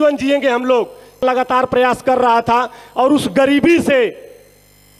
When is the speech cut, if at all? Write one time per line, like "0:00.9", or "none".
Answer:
0:01.2